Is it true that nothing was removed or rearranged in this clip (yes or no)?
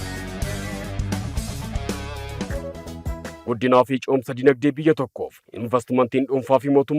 no